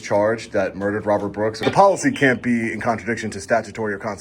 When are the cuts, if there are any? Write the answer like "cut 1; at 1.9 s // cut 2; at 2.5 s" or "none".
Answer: cut 1; at 1.6 s

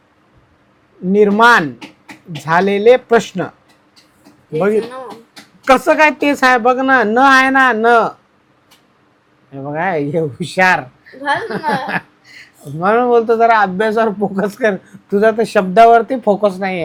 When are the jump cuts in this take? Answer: none

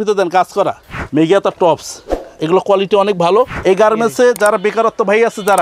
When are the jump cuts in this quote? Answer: cut 1; at 3.5 s

